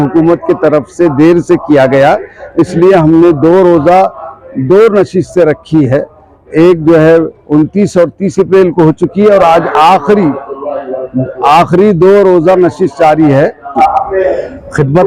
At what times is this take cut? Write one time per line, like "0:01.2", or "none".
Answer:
0:13.6